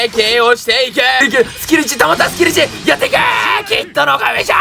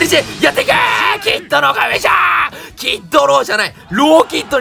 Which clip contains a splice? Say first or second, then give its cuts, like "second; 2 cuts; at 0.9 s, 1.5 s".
first; 1 cut; at 1.2 s